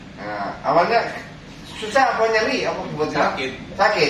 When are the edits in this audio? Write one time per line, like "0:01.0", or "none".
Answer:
none